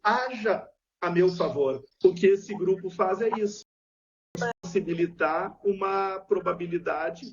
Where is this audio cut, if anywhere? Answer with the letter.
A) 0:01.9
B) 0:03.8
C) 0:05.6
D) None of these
A